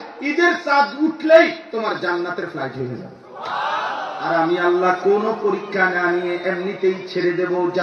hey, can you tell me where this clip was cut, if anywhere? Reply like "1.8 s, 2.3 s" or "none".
4.2 s